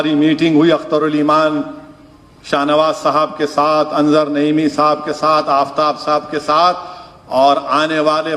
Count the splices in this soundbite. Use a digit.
0